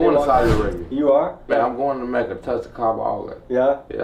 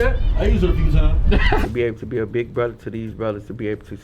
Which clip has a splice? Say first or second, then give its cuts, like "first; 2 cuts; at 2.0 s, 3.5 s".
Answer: second; 1 cut; at 1.6 s